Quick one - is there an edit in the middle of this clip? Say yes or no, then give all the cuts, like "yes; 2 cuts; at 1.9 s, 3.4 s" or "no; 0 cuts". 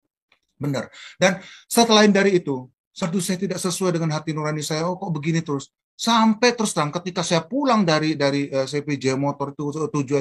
yes; 1 cut; at 3.0 s